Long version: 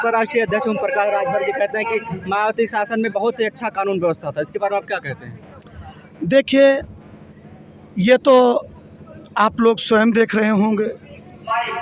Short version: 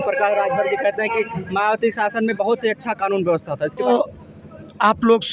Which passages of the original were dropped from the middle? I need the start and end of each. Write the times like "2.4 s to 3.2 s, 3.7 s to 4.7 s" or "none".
4.6 s to 8.4 s